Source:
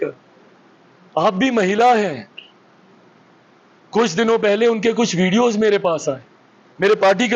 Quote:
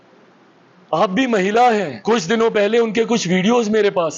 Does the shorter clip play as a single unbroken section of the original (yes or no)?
no